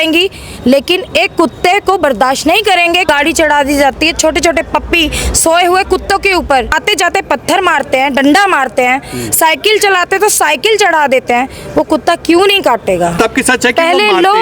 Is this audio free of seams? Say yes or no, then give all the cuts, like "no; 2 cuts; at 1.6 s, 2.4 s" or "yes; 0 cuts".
no; 3 cuts; at 3.0 s, 6.7 s, 13.2 s